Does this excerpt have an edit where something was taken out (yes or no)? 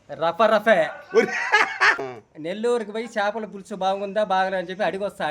yes